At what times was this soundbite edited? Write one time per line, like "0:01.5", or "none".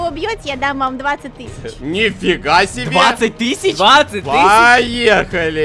none

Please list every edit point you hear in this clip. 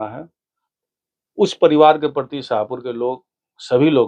none

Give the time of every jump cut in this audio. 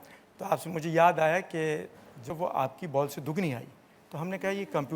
0:02.3

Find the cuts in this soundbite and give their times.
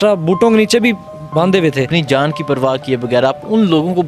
0:01.9

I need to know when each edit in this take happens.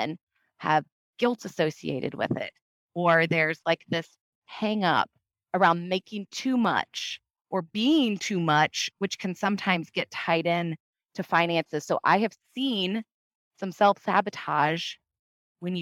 none

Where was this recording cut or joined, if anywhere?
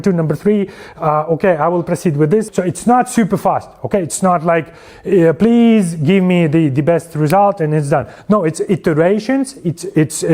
0:02.5

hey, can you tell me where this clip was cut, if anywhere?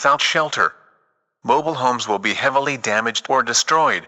none

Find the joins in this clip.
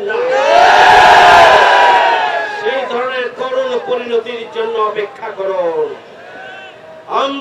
none

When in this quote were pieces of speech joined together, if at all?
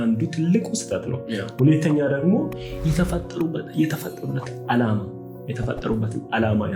none

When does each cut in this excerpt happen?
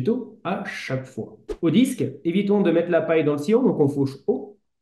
0:01.5

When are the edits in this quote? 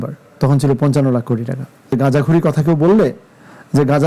0:01.9

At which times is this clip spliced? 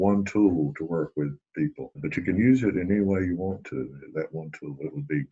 0:02.0

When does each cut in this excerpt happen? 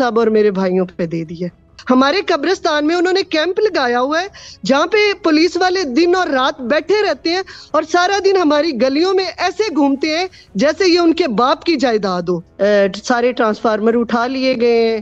0:01.7
0:12.5

